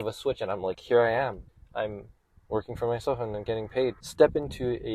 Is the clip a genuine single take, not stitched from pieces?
no; 2 cuts; at 1.5 s, 4.0 s

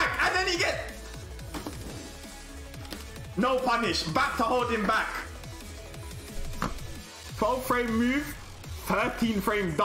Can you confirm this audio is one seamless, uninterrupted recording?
yes; 0 cuts

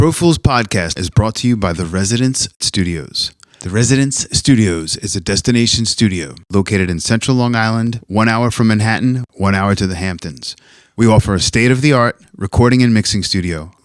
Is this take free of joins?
no; 1 cut; at 1.0 s

